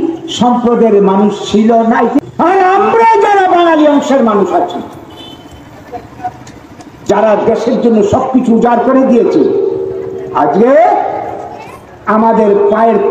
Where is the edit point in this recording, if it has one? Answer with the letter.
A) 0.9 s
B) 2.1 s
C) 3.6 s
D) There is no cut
B